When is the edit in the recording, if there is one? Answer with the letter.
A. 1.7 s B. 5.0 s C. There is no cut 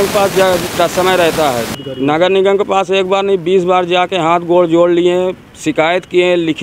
A